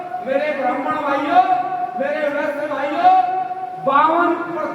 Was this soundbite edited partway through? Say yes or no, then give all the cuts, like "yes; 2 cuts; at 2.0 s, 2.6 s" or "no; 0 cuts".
no; 0 cuts